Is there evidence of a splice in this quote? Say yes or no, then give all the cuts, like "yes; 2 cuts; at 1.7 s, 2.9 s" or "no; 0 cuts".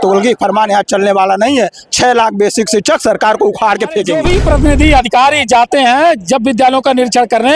yes; 1 cut; at 4.2 s